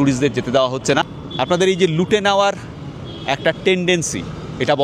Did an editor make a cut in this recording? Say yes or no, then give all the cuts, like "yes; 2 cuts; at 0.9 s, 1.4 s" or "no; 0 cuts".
yes; 1 cut; at 1.1 s